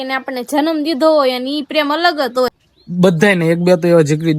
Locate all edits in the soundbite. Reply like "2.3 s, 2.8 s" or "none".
2.5 s